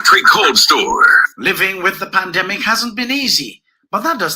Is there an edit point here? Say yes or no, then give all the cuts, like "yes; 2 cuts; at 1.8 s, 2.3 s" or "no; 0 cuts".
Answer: yes; 1 cut; at 1.2 s